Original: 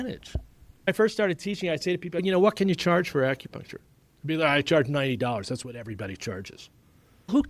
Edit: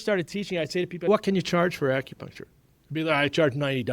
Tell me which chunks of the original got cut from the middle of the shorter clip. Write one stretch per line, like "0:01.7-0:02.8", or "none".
0:02.2-0:02.4